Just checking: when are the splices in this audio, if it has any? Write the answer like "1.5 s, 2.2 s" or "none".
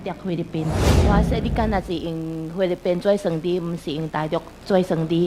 1.0 s